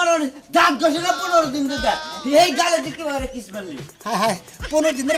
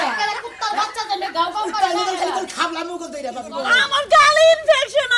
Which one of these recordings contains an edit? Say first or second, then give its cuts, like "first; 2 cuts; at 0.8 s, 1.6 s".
second; 1 cut; at 3.5 s